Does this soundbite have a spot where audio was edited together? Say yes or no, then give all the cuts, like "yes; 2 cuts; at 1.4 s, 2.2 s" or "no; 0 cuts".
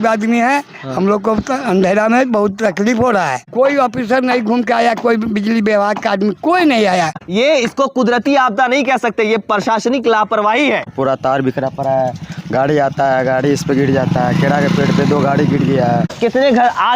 yes; 4 cuts; at 3.4 s, 7.2 s, 10.9 s, 16.1 s